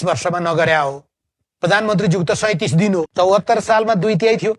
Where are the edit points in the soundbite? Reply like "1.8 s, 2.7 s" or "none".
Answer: 3.1 s